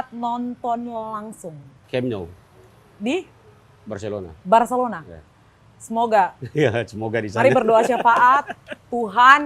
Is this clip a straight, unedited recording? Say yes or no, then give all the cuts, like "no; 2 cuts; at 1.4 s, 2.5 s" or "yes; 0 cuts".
no; 1 cut; at 1.7 s